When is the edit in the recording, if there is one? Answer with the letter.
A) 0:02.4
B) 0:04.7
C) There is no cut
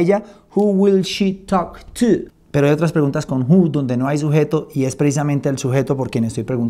A